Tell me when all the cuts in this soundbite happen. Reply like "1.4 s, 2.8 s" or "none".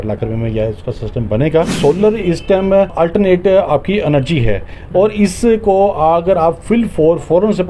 1.7 s, 2.9 s, 6.6 s